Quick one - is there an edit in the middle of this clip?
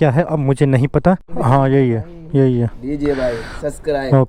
yes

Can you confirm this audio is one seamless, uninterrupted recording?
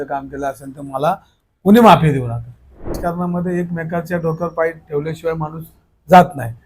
no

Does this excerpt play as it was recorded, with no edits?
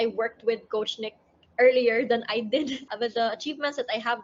no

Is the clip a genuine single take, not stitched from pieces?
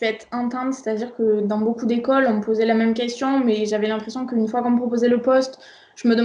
yes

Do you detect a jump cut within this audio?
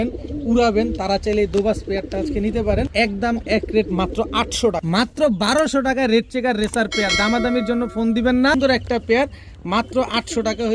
yes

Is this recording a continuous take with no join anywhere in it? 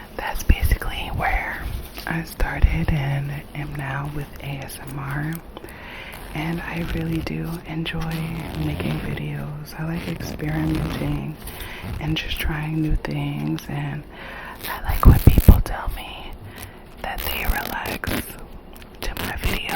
yes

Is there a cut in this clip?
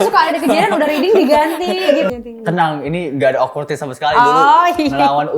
yes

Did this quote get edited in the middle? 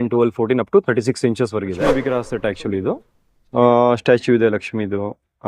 yes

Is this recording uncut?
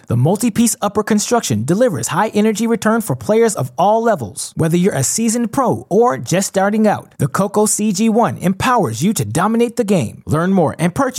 yes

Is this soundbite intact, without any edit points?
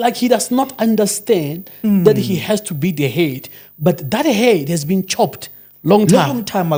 yes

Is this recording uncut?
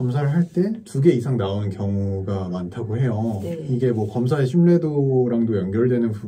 yes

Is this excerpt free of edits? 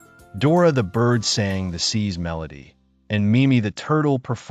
yes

